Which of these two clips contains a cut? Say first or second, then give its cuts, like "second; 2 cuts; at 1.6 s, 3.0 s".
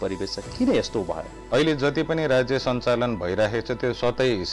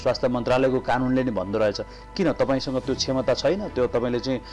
first; 1 cut; at 1.3 s